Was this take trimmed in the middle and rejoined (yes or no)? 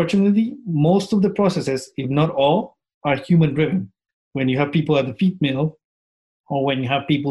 yes